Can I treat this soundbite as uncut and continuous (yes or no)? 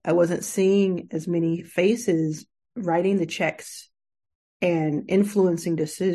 yes